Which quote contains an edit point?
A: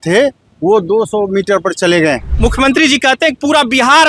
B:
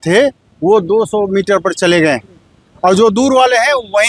A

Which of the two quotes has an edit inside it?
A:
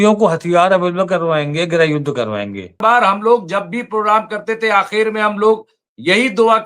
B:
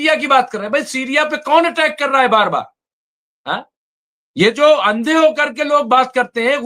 A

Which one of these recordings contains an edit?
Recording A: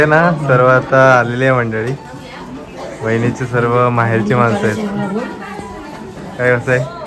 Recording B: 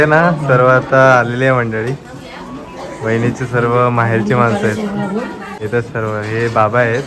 B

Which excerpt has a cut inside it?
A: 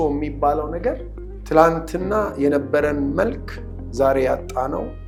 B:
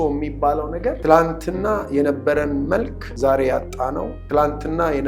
B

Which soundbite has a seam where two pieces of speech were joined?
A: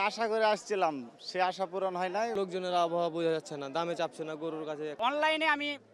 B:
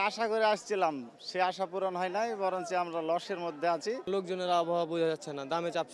A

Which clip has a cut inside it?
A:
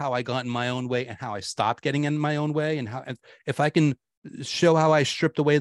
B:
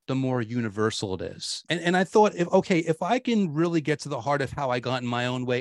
B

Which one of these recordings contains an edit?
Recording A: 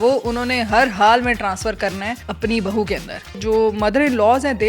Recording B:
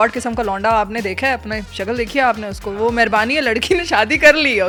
A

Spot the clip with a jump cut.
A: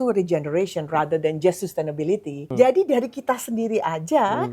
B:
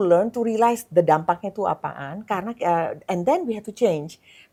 A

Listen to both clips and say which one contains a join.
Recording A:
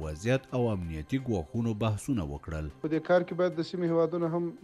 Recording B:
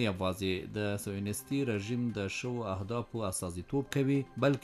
A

